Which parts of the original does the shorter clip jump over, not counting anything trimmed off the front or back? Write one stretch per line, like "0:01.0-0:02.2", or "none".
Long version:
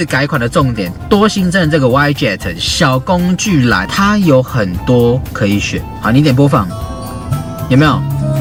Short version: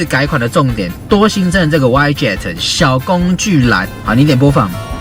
0:03.9-0:05.8